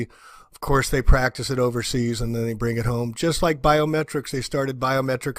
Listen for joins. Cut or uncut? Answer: uncut